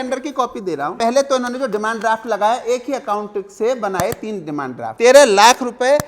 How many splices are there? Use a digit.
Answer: 2